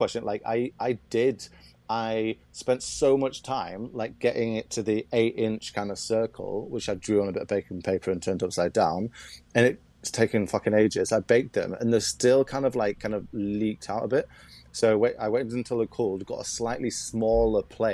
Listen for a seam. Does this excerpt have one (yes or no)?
no